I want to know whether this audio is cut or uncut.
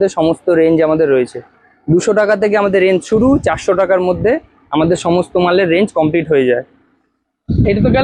uncut